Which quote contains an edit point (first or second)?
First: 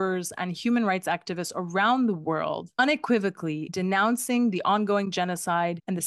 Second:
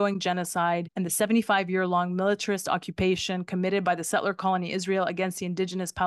first